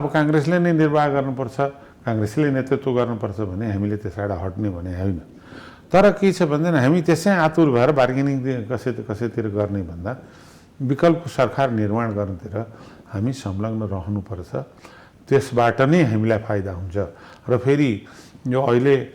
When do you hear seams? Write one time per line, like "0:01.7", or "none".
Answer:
none

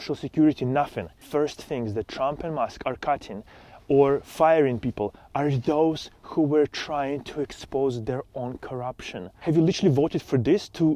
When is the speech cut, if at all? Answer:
0:01.1
0:09.2

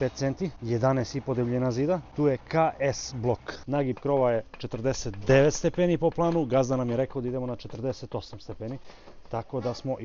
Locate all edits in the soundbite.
0:03.6

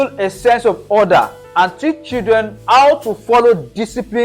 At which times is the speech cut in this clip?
0:02.6

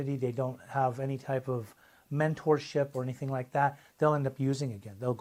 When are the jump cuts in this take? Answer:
none

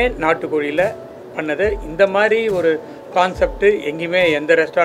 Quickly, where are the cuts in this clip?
none

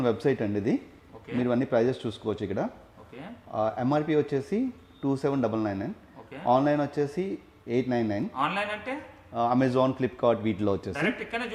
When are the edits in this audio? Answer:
none

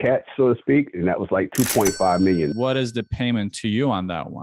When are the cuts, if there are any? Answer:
0:02.5

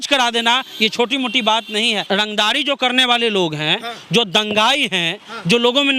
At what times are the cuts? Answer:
0:02.0

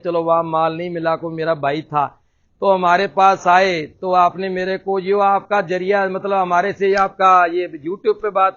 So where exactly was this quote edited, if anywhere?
none

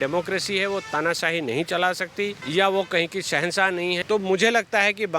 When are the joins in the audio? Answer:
0:02.4
0:04.0

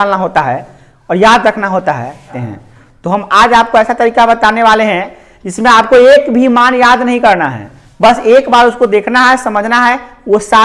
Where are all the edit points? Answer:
0:02.4

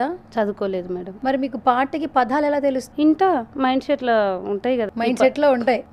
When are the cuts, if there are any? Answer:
0:01.1
0:02.8
0:04.9

